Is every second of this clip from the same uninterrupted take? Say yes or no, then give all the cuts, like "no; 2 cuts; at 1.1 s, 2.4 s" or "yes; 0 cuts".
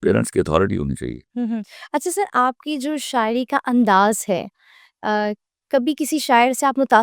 no; 1 cut; at 1.2 s